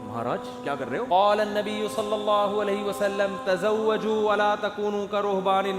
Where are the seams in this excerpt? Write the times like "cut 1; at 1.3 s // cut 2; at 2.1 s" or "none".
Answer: cut 1; at 1.1 s